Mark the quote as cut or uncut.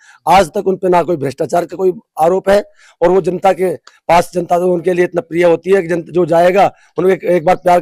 uncut